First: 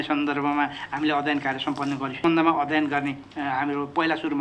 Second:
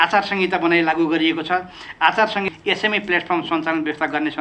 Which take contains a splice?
first; 1 cut; at 2.1 s

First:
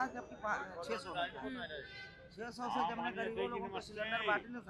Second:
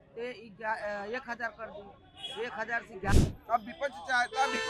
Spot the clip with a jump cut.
second; 1 cut; at 3.1 s

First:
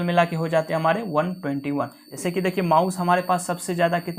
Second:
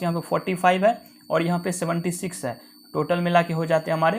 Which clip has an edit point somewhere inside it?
first; 1 cut; at 2.0 s

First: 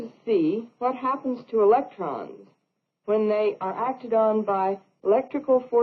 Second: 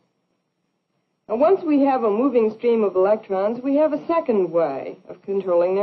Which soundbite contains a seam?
first; 1 cut; at 2.2 s

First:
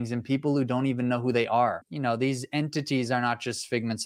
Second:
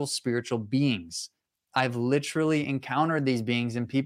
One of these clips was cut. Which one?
first; 1 cut; at 1.9 s

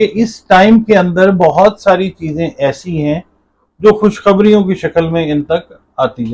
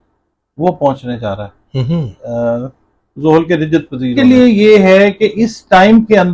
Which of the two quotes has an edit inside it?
second; 1 cut; at 4.1 s

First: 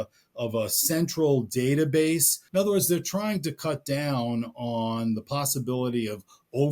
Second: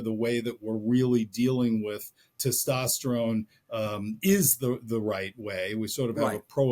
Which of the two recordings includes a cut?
first; 1 cut; at 2.4 s

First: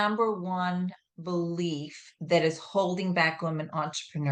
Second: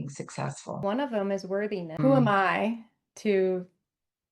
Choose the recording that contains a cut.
second; 2 cuts; at 0.8 s, 1.9 s

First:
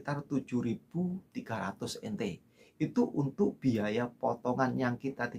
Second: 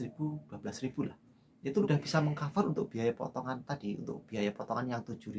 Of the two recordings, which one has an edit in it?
second; 1 cut; at 1.8 s

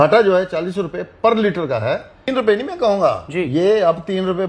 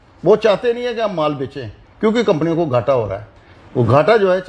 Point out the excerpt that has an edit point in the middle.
first; 1 cut; at 2.3 s

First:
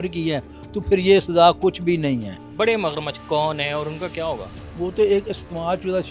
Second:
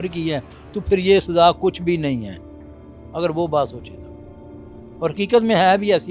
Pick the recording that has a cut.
first; 2 cuts; at 2.4 s, 4.6 s

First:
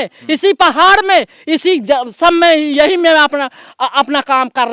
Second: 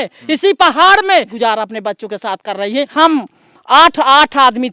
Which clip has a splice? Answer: second; 2 cuts; at 1.3 s, 2.9 s

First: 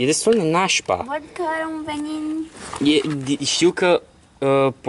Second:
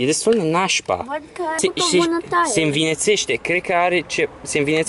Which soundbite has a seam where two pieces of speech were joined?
second; 1 cut; at 1.6 s

